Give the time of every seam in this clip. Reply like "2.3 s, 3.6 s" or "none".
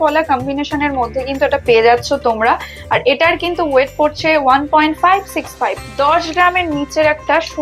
5.7 s